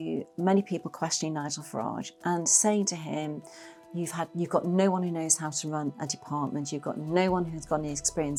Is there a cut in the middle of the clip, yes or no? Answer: no